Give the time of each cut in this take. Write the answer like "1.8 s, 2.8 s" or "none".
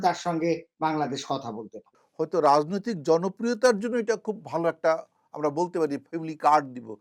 1.9 s